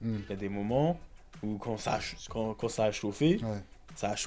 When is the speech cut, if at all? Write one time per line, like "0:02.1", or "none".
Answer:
none